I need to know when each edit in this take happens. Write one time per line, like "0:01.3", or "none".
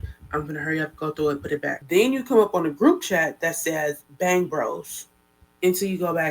0:01.8